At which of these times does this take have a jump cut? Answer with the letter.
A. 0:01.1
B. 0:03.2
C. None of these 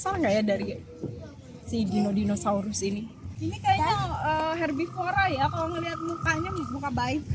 B